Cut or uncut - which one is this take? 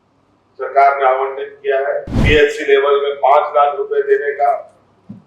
cut